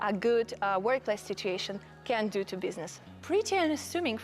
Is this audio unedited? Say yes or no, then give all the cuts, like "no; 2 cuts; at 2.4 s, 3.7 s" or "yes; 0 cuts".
no; 1 cut; at 3.1 s